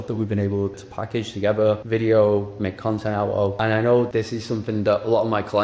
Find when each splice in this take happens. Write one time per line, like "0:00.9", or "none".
0:00.8
0:01.8
0:03.6
0:04.1